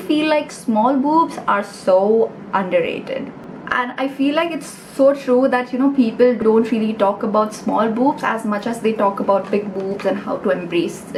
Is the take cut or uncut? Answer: uncut